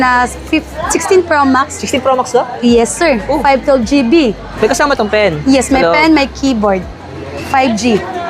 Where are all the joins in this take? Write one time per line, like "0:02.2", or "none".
0:04.5